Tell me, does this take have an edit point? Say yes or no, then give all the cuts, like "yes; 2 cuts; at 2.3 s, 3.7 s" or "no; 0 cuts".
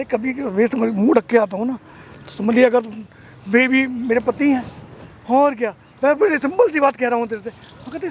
no; 0 cuts